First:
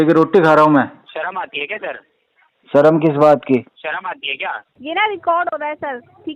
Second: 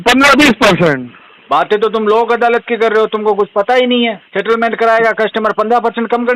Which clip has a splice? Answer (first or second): first